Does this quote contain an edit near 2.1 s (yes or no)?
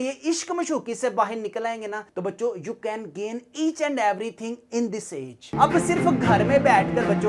yes